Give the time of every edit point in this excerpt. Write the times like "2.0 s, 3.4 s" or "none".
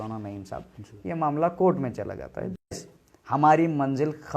2.8 s